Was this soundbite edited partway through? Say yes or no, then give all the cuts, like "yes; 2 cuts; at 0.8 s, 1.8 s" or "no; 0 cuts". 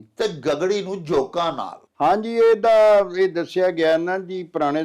no; 0 cuts